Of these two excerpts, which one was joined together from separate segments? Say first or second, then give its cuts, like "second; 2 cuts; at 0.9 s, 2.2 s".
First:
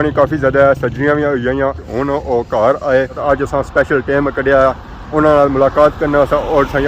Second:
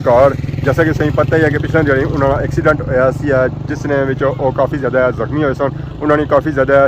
first; 2 cuts; at 1.8 s, 3.2 s